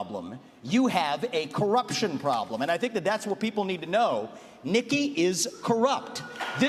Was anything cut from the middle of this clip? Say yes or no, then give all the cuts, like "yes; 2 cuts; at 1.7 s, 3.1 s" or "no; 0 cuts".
no; 0 cuts